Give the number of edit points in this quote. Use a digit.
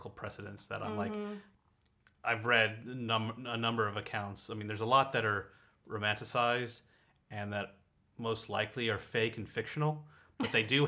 1